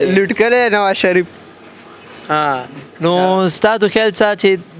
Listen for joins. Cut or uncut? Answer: uncut